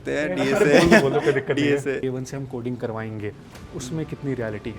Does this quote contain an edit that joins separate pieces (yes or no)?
yes